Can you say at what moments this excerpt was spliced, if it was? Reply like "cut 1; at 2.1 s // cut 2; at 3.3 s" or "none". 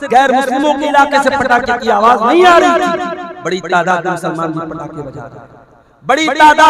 none